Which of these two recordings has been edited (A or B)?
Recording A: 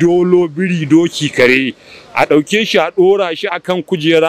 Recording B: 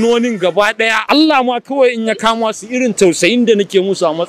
B